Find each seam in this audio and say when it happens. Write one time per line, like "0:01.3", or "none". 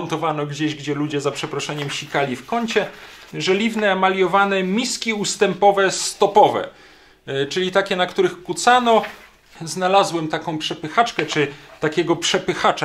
0:03.3
0:09.6

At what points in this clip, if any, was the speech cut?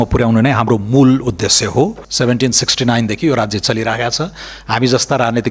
0:02.0

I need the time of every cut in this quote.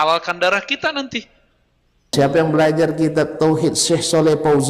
0:02.1

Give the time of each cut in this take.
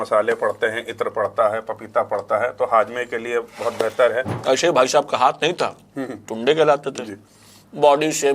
0:04.3

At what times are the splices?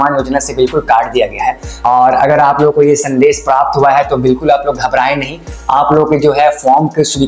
0:01.7

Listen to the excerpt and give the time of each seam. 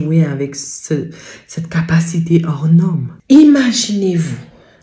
0:03.1

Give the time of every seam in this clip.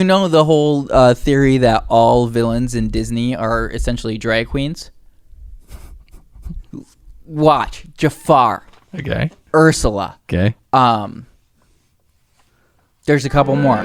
none

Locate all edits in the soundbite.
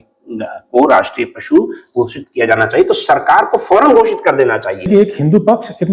0:04.9

